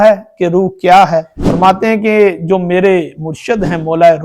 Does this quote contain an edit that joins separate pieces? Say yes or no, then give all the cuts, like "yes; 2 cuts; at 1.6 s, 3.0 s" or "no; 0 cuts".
yes; 1 cut; at 1.4 s